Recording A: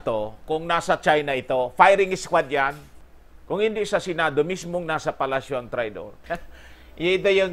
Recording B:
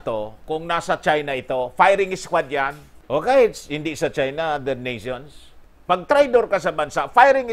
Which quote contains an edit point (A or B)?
A